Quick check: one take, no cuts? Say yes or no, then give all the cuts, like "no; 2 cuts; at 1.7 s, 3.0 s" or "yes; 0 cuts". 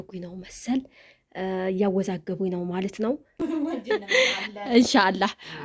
no; 1 cut; at 3.4 s